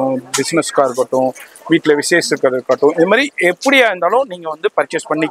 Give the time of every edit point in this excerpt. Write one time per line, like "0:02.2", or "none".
none